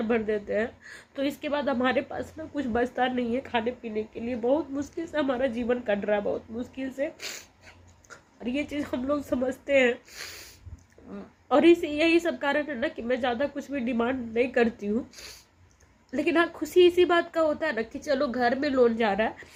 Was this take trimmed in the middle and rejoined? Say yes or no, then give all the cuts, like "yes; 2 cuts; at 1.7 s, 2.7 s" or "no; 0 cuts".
no; 0 cuts